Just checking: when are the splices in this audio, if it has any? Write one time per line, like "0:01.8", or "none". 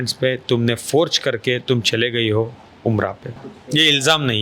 0:03.5